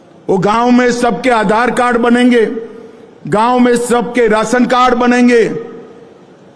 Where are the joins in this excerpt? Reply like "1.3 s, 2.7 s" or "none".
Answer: none

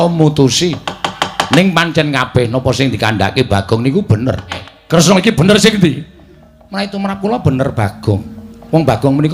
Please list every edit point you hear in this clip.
4.7 s

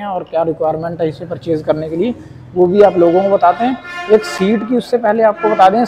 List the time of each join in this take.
none

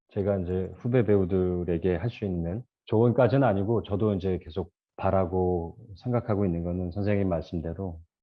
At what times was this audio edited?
2.7 s

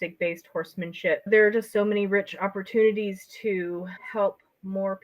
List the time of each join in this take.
1.3 s

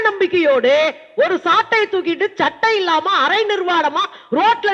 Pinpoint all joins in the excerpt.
none

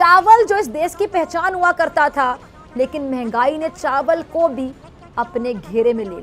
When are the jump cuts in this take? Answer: none

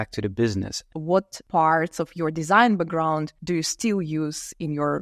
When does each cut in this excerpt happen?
0.9 s, 3.3 s

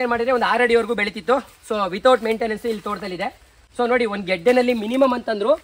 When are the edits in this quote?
none

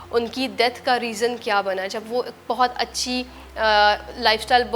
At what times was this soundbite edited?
none

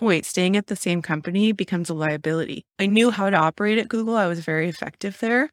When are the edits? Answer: 2.7 s

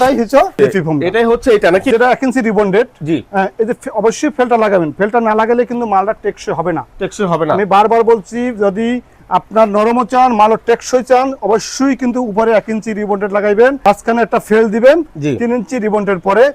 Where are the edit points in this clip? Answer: 1.9 s, 13.8 s

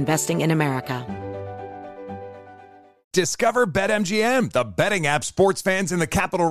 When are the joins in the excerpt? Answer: 1.0 s

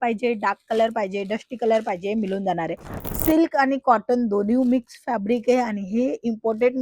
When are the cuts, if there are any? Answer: 3.0 s

